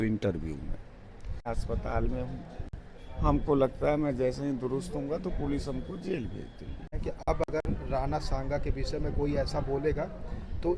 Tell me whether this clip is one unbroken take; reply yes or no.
no